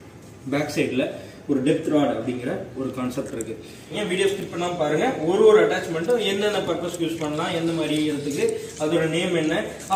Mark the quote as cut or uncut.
cut